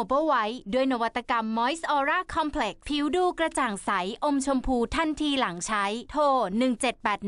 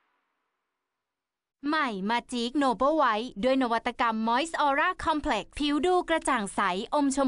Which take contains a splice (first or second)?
second